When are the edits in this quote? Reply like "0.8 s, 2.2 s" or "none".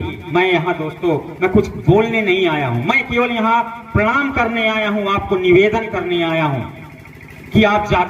none